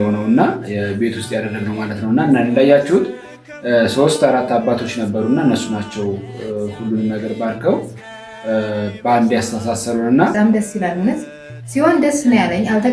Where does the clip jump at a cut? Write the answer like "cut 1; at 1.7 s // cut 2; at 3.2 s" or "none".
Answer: cut 1; at 10.3 s